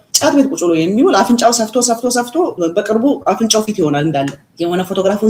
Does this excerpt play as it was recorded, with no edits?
yes; 0 cuts

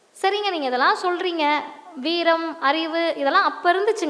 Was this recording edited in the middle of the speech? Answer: no; 0 cuts

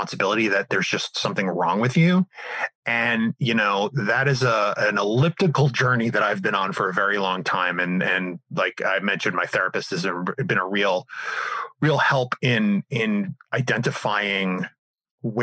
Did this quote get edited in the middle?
no; 0 cuts

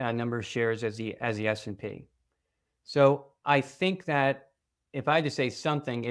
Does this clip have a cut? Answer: no; 0 cuts

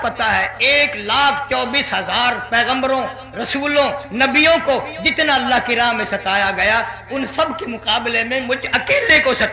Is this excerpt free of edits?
yes; 0 cuts

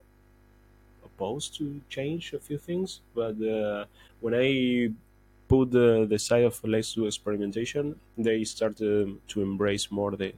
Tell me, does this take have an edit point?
no; 0 cuts

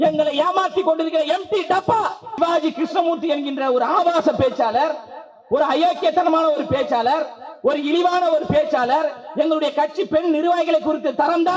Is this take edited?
yes; 1 cut; at 2.4 s

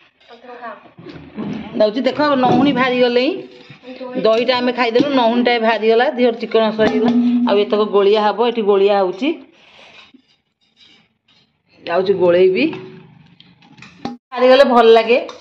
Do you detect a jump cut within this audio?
yes; 1 cut; at 14.4 s

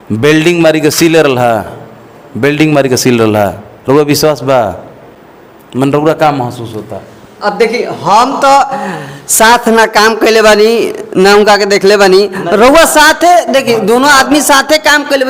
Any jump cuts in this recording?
no; 0 cuts

